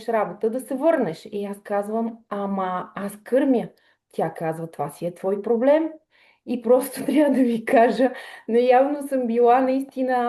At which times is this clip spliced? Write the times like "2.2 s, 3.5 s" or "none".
none